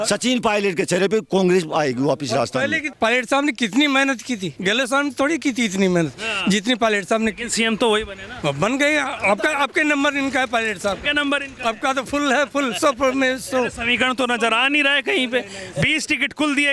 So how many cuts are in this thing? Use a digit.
1